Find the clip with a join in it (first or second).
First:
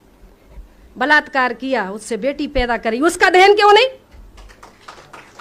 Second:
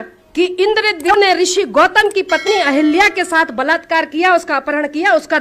second